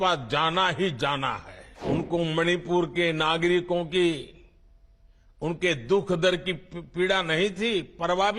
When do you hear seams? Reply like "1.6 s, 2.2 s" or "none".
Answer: 1.5 s